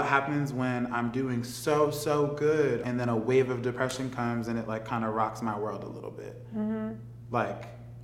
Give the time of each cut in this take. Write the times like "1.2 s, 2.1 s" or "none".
2.8 s